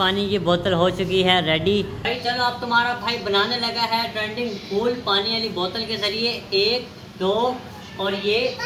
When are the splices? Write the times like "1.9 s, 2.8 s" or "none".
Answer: 2.0 s